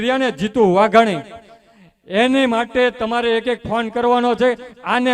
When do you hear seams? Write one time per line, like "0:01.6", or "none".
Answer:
none

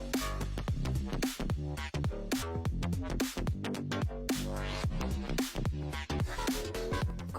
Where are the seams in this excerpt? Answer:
0:02.5

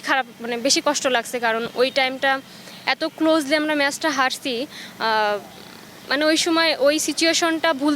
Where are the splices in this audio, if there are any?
none

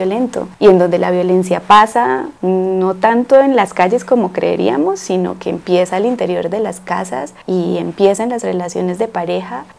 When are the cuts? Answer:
none

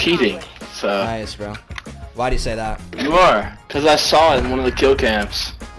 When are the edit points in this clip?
0:03.6

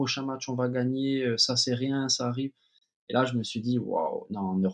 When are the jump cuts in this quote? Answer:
none

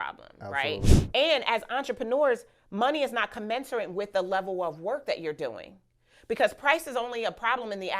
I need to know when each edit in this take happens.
0:00.9

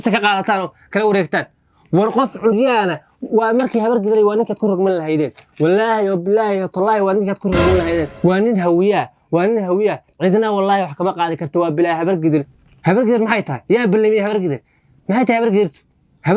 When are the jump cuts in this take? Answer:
0:08.1
0:12.6

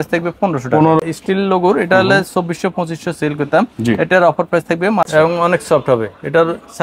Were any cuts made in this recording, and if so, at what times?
0:01.0
0:05.1

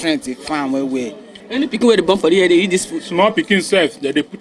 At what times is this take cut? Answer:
0:01.4

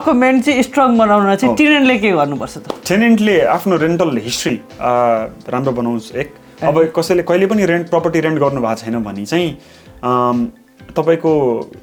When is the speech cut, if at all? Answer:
none

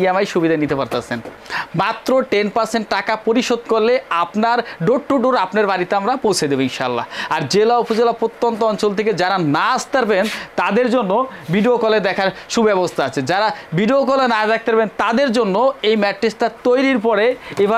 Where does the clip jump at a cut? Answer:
none

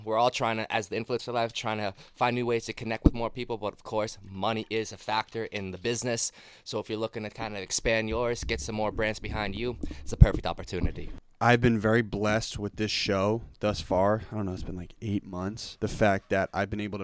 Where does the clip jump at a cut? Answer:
0:11.1
0:15.6

